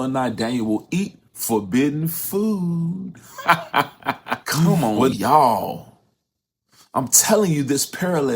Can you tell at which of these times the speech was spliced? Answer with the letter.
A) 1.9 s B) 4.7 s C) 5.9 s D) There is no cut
B